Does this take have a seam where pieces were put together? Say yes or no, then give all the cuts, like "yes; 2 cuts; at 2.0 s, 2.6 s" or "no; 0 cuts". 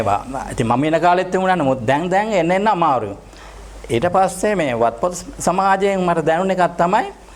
no; 0 cuts